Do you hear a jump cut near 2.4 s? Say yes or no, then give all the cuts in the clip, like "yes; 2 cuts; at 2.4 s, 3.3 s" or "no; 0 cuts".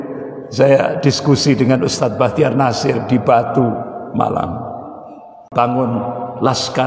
no; 1 cut; at 5.4 s